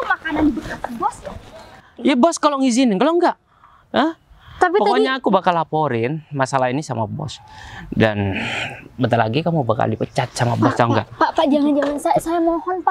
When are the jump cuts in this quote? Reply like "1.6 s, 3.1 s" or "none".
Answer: 1.8 s